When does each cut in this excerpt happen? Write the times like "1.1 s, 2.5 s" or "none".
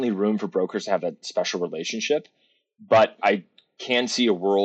1.2 s, 3.2 s